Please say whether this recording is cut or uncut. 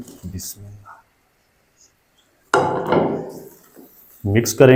uncut